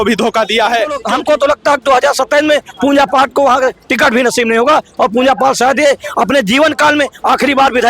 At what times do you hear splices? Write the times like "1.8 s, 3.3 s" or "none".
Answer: 1.0 s